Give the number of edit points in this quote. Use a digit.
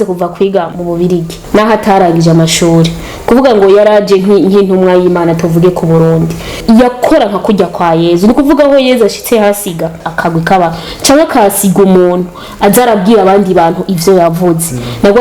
3